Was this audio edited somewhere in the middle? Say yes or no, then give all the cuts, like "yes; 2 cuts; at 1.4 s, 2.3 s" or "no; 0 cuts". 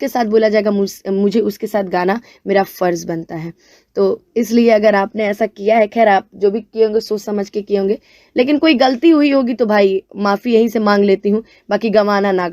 no; 0 cuts